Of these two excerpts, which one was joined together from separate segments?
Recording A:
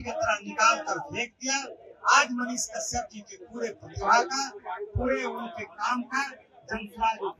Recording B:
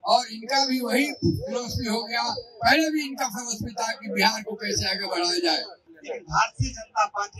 B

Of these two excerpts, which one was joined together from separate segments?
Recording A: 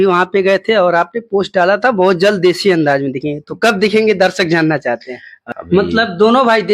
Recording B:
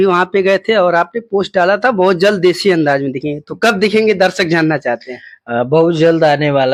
A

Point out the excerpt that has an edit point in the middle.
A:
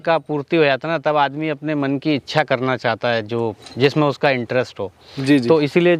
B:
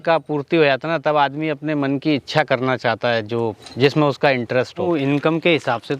B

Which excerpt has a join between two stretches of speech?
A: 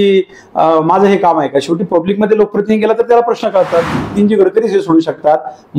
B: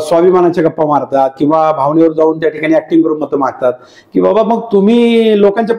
A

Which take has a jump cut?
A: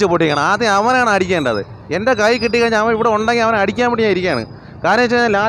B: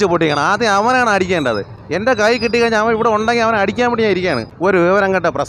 B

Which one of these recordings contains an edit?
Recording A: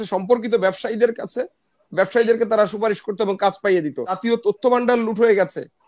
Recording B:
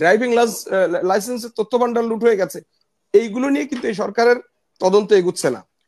A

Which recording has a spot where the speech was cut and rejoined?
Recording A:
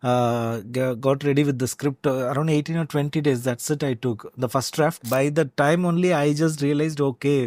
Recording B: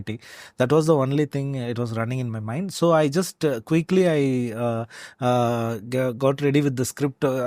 A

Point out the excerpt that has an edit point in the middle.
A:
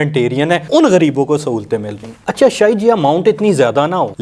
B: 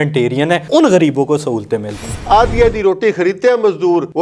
B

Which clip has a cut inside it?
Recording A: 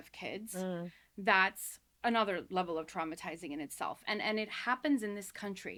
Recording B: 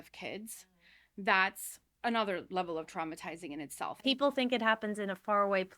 B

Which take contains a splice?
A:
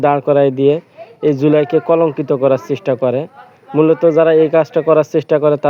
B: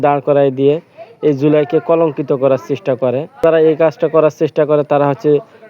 B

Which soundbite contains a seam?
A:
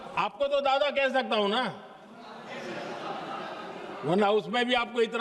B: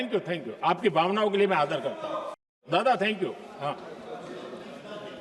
B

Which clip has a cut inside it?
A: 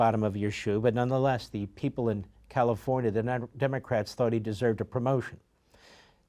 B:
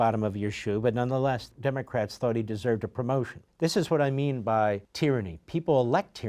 B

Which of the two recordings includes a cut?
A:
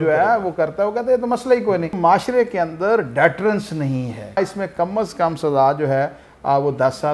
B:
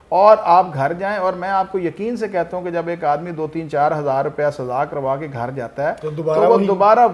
A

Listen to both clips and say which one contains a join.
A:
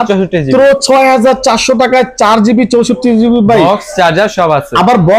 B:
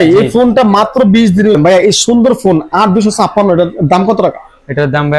B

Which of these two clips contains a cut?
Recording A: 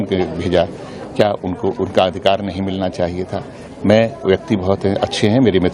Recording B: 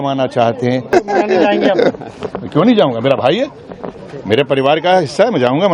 B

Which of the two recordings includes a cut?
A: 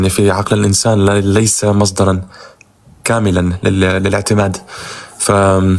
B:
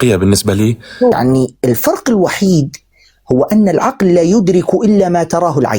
B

